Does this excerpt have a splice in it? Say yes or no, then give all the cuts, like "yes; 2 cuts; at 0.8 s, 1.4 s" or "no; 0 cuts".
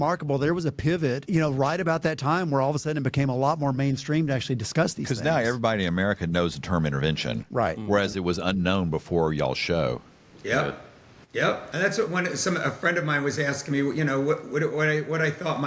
yes; 2 cuts; at 1.2 s, 11.7 s